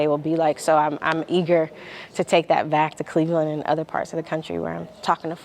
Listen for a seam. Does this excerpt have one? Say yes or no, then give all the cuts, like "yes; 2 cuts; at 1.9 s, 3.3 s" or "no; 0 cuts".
no; 0 cuts